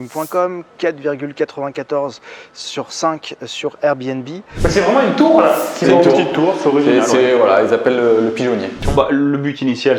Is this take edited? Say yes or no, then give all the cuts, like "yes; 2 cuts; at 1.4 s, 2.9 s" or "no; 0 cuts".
yes; 2 cuts; at 4.5 s, 8.9 s